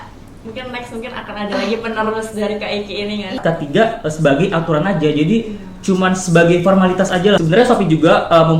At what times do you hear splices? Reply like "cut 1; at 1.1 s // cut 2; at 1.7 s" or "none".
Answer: cut 1; at 3.4 s // cut 2; at 7.4 s